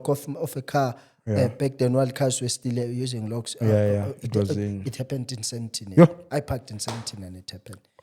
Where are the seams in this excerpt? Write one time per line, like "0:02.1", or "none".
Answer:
none